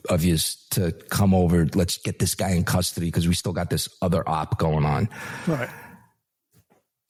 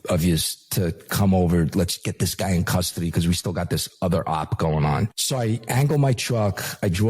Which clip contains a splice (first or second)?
second